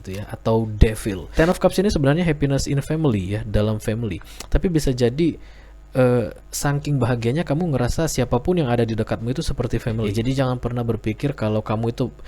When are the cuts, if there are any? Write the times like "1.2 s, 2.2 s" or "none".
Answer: 1.2 s, 10.1 s